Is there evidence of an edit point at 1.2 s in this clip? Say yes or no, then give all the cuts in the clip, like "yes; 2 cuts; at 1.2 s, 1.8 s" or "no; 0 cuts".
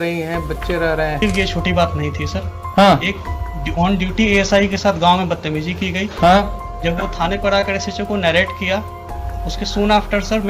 yes; 1 cut; at 1.2 s